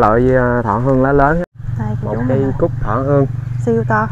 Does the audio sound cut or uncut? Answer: cut